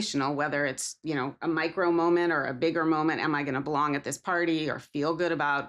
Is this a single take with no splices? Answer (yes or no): yes